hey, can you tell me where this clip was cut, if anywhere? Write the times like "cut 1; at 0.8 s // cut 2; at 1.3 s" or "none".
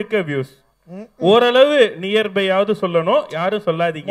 none